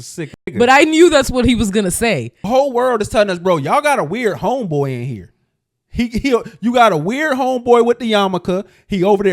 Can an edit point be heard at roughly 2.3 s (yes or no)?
yes